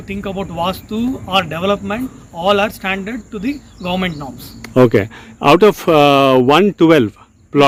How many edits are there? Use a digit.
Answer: 0